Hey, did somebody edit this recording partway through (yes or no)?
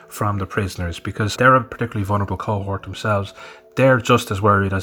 yes